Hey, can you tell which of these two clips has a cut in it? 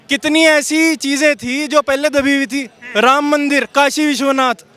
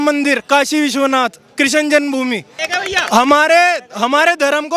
second; 1 cut; at 2.7 s

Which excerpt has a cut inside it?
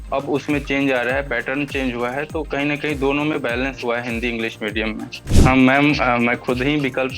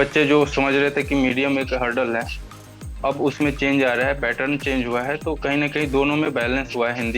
first; 1 cut; at 5.2 s

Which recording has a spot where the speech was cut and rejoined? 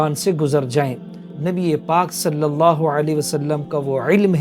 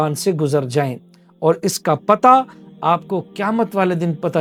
first; 1 cut; at 1.3 s

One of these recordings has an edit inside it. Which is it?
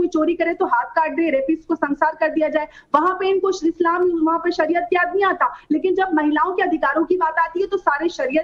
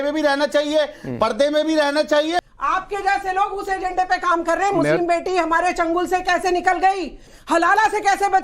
second; 2 cuts; at 2.4 s, 7.3 s

